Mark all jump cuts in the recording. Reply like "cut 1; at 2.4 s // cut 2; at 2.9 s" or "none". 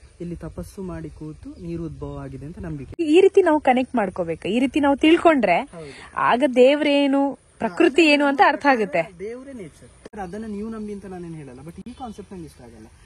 cut 1; at 3.0 s // cut 2; at 10.1 s